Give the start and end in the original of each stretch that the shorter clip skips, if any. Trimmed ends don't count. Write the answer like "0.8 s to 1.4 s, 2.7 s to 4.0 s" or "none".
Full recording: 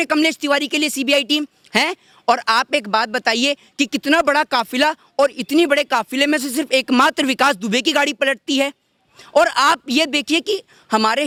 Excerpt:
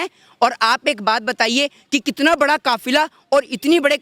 none